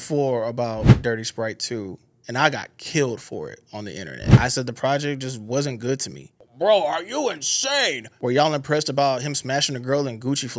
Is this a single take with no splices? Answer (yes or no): no